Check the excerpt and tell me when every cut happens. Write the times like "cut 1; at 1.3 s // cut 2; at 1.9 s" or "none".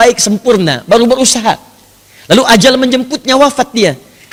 none